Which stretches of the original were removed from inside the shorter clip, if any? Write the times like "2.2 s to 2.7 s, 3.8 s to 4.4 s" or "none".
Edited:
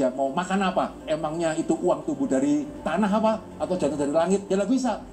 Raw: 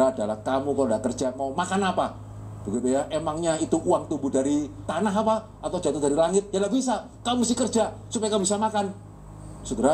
2.2 s to 3.1 s